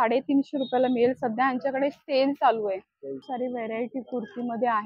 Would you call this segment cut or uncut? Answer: uncut